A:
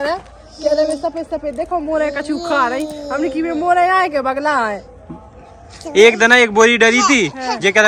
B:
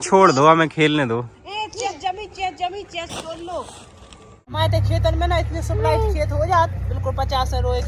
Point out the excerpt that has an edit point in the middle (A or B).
B